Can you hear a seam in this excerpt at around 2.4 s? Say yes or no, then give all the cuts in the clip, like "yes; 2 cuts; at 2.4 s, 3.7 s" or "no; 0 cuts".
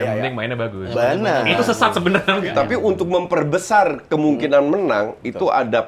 yes; 1 cut; at 2.4 s